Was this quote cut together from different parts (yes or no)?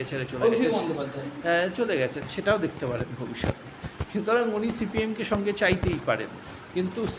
no